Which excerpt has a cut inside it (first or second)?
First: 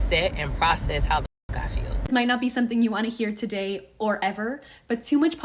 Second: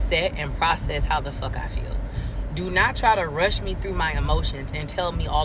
first